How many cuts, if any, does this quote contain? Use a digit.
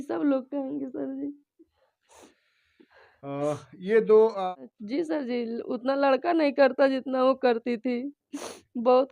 1